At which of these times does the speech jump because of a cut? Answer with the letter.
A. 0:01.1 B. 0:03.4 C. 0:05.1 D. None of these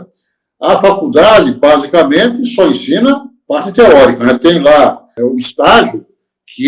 C